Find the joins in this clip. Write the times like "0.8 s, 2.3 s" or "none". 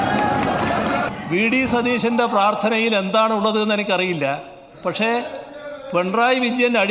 1.1 s